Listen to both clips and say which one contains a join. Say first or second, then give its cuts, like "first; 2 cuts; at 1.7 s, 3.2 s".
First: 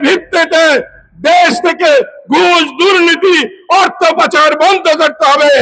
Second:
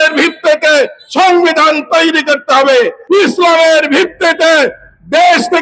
second; 1 cut; at 3.0 s